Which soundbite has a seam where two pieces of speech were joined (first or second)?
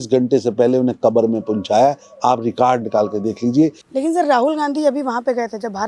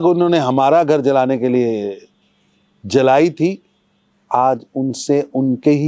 first